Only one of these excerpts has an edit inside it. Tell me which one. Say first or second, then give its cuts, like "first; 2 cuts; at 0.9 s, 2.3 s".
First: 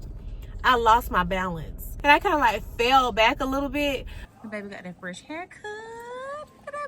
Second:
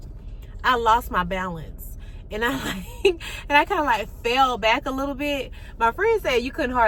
first; 2 cuts; at 1.9 s, 4.1 s